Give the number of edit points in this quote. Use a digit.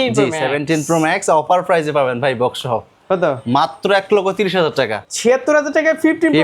1